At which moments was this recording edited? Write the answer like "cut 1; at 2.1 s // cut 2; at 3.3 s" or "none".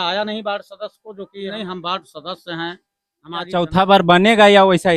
cut 1; at 1.5 s // cut 2; at 3.6 s